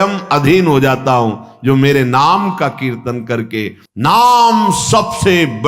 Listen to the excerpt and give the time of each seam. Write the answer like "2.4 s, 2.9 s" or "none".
3.8 s

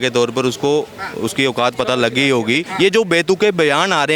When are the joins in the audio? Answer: 2.6 s

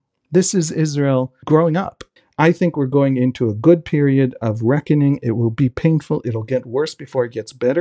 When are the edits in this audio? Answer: 1.4 s, 2.0 s

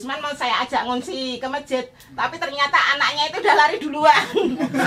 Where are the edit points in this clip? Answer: none

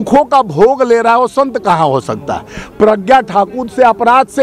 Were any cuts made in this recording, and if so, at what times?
none

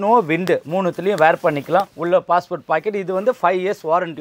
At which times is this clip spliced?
1.9 s

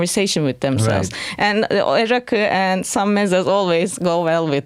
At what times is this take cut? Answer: none

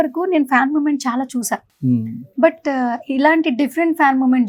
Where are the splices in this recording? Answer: none

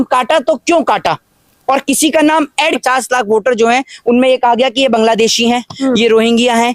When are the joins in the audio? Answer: 2.8 s

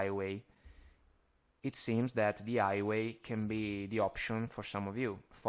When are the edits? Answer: none

